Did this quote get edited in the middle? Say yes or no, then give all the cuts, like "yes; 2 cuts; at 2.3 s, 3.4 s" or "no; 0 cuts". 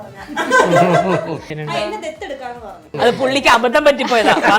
yes; 2 cuts; at 1.6 s, 2.9 s